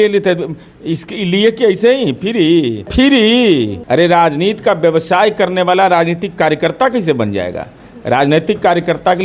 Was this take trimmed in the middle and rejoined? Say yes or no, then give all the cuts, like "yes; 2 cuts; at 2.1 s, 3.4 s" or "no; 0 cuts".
yes; 2 cuts; at 2.9 s, 3.8 s